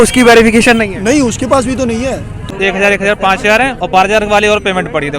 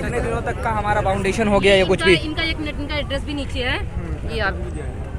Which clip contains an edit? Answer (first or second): first